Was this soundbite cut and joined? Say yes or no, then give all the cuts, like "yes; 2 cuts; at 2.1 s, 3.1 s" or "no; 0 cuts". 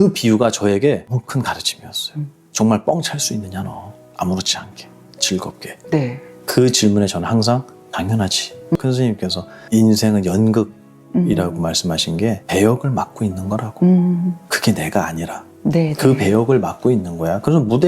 yes; 1 cut; at 8.8 s